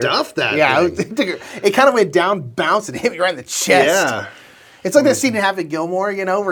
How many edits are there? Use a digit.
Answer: 0